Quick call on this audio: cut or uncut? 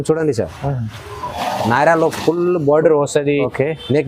cut